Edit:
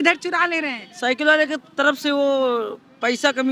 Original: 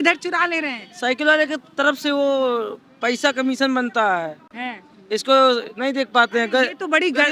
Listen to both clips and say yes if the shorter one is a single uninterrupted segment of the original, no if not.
yes